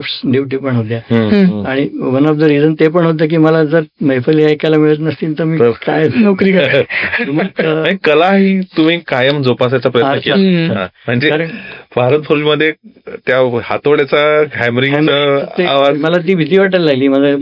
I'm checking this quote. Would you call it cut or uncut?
uncut